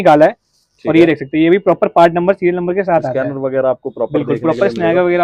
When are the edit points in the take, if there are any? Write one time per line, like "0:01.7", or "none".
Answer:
none